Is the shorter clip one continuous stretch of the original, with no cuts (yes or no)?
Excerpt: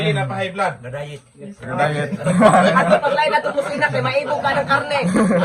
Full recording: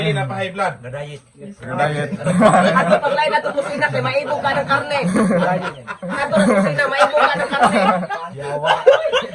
yes